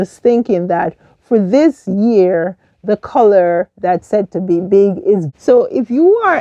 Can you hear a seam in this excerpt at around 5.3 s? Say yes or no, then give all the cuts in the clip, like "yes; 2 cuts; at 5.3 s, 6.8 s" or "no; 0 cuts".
yes; 1 cut; at 5.3 s